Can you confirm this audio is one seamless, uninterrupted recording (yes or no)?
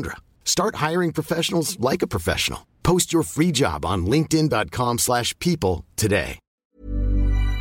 no